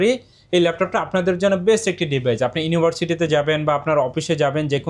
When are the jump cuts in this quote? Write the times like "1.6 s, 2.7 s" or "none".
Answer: none